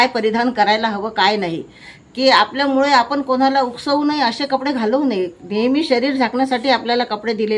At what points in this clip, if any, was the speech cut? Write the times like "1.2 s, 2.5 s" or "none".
none

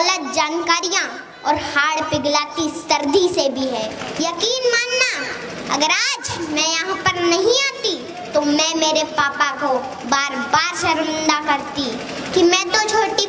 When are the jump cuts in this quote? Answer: 4.0 s

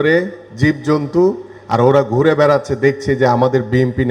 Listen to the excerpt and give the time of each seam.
none

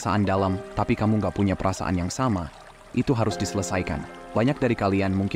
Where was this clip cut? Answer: 4.1 s

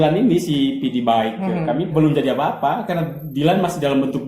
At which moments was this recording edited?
1.9 s

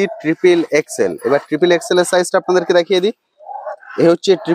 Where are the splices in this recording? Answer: none

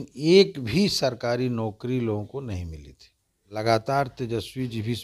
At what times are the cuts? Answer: 3.6 s

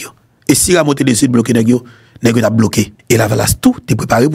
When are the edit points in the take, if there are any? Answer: 3.0 s

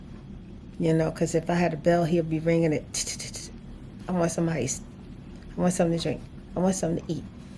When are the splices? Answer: none

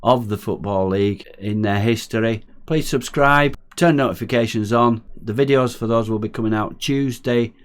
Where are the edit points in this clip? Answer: 1.3 s, 2.5 s, 3.6 s, 5.2 s

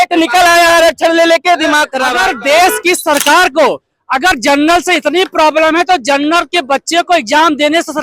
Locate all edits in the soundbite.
2.0 s

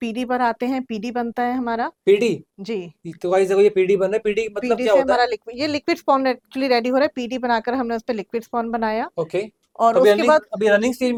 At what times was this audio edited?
none

